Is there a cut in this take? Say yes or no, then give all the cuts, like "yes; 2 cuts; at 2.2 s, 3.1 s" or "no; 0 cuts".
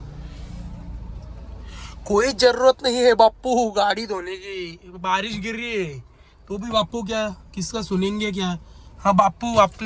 no; 0 cuts